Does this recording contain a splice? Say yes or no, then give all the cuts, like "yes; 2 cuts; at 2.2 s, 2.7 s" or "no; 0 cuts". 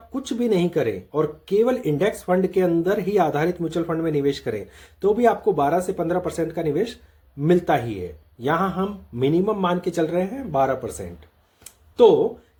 no; 0 cuts